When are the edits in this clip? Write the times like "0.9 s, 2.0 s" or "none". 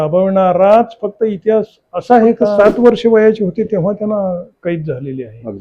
2.6 s